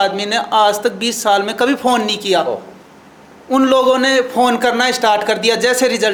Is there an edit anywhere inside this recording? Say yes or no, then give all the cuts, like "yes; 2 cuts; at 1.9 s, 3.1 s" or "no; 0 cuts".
no; 0 cuts